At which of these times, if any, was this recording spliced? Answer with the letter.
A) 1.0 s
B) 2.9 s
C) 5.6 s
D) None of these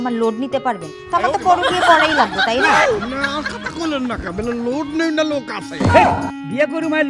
B